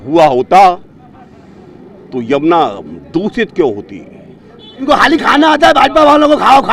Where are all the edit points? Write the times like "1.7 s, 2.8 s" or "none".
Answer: 4.7 s